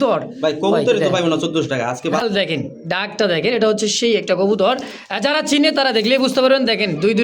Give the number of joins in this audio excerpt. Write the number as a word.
one